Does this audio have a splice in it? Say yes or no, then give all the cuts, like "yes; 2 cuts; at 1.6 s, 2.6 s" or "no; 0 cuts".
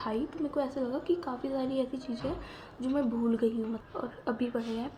no; 0 cuts